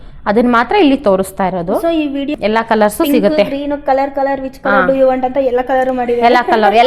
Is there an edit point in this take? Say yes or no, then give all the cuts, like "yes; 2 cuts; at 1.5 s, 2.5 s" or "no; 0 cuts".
yes; 1 cut; at 2.3 s